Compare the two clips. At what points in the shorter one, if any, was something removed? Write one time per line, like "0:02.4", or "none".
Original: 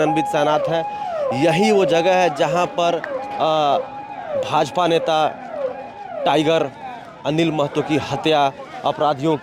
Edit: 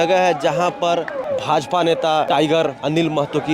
0:01.2
0:02.4